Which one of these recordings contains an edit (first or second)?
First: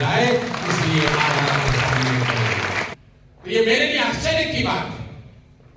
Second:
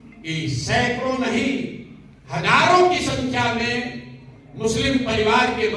first